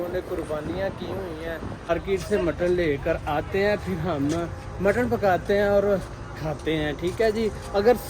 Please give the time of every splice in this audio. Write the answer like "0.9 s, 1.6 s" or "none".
1.9 s